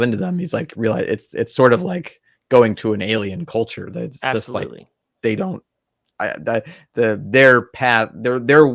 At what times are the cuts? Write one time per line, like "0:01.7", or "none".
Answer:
none